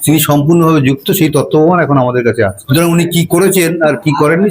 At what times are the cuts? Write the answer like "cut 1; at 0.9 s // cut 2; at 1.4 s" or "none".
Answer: cut 1; at 2.6 s

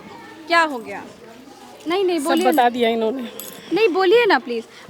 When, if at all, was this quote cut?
none

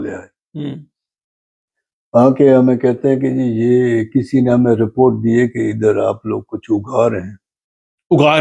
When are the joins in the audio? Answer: none

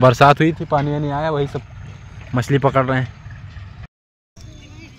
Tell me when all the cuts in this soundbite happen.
cut 1; at 4.0 s

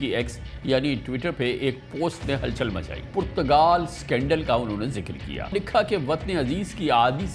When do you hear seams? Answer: cut 1; at 3.0 s // cut 2; at 5.5 s

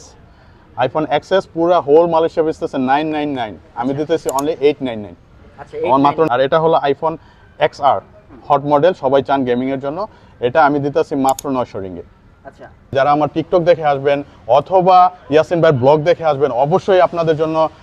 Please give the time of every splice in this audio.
cut 1; at 6.3 s // cut 2; at 12.9 s

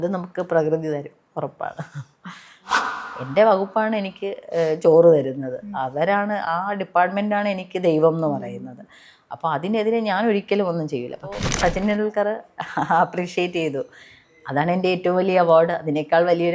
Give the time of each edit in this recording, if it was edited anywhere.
cut 1; at 2.7 s // cut 2; at 11.4 s

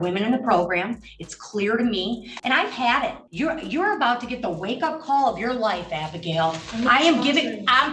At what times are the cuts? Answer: cut 1; at 2.3 s // cut 2; at 3.2 s

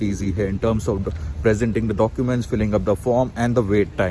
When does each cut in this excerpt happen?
none

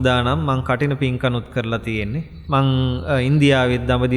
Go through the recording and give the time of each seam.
cut 1; at 2.3 s

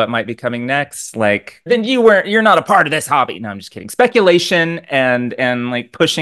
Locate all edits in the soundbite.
cut 1; at 1.6 s

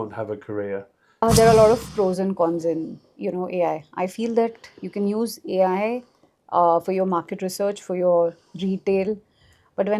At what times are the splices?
cut 1; at 1.2 s

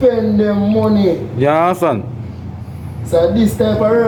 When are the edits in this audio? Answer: none

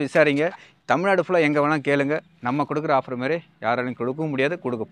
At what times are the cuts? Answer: none

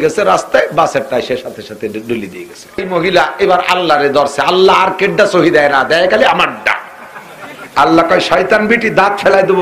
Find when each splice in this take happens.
cut 1; at 2.9 s

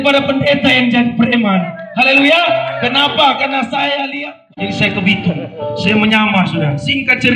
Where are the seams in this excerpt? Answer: cut 1; at 4.4 s

